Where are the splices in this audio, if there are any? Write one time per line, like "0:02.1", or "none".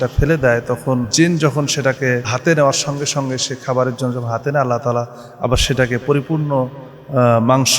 0:01.1
0:02.3